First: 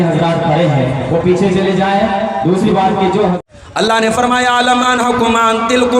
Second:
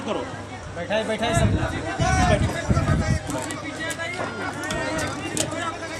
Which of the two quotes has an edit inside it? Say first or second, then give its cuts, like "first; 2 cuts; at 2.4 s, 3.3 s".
first; 1 cut; at 3.5 s